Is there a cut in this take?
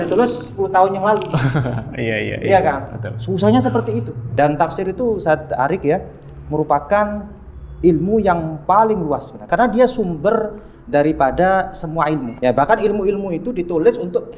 yes; 3 cuts; at 4.2 s, 9.5 s, 12.3 s

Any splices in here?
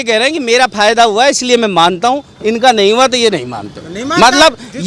no; 0 cuts

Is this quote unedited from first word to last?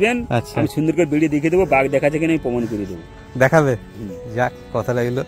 yes; 0 cuts

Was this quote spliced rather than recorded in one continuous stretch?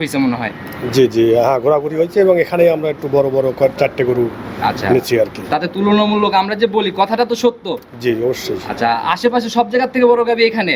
no; 0 cuts

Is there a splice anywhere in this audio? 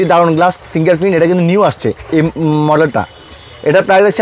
no; 0 cuts

